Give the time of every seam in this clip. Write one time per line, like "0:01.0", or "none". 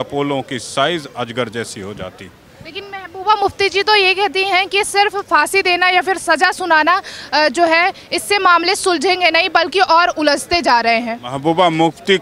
none